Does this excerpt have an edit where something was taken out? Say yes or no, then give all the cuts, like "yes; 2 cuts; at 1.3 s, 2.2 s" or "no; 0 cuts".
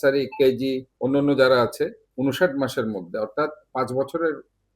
yes; 2 cuts; at 0.9 s, 2.0 s